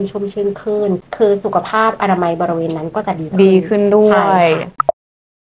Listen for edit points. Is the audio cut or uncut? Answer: uncut